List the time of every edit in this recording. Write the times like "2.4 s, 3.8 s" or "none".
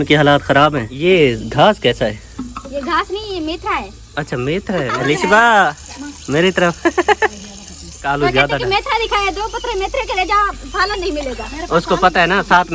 0.9 s, 5.0 s, 8.1 s